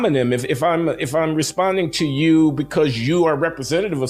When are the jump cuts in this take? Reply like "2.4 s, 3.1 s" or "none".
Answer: none